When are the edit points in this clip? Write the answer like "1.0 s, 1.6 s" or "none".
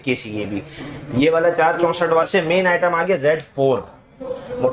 2.2 s